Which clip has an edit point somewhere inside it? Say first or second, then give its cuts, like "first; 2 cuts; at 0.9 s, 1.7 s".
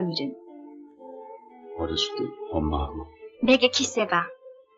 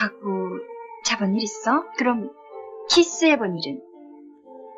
first; 1 cut; at 3.2 s